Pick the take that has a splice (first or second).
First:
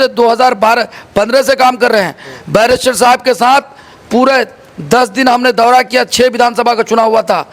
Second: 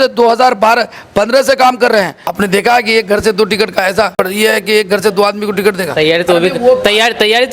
second